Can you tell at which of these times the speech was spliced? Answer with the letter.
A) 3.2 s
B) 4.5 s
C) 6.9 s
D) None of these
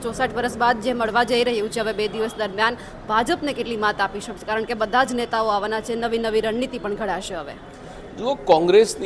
D